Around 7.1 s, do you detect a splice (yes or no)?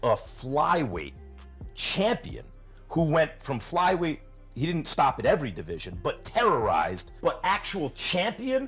yes